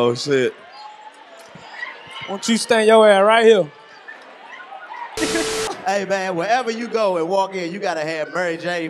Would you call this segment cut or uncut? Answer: cut